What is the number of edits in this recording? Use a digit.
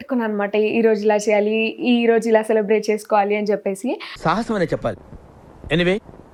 0